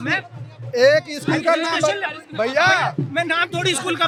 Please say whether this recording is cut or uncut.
uncut